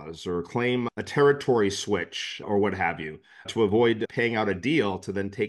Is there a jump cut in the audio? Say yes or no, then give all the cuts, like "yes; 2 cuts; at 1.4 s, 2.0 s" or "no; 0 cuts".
no; 0 cuts